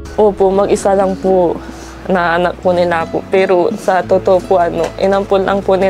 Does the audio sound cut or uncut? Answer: uncut